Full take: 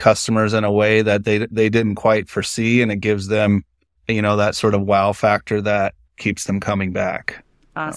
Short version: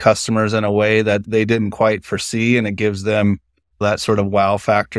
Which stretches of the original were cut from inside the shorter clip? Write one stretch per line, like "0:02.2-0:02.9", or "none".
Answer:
0:01.2-0:01.5
0:04.0-0:04.4